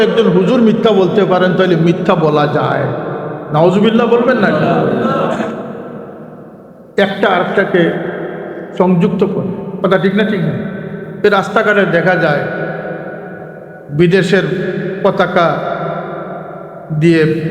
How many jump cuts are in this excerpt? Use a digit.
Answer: 1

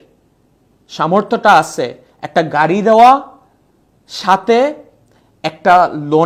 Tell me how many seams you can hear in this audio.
0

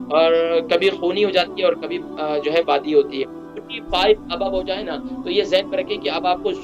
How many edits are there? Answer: 1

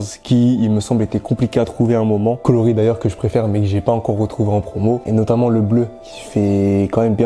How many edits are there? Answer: 2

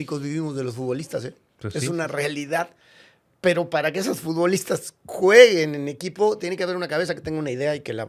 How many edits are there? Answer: 0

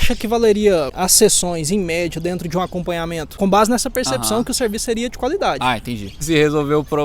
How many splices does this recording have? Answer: 2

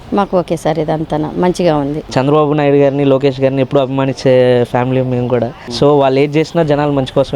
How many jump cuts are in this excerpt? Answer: 1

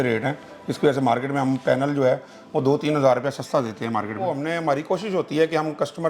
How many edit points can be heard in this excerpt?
1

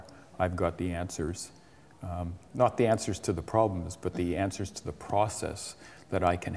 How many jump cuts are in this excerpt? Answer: 0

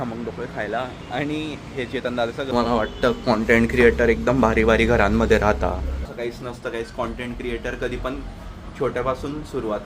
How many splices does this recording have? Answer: 2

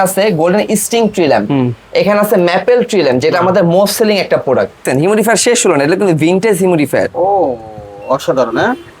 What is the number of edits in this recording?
1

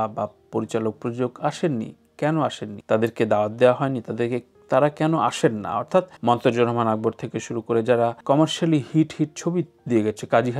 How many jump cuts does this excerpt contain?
3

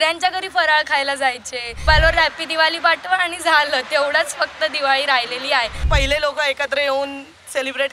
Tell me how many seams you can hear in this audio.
2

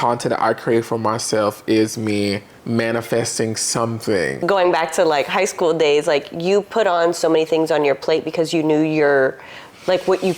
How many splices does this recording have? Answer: 1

